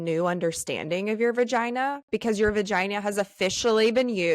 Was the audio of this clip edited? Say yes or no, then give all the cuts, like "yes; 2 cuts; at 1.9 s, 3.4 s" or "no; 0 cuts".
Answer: no; 0 cuts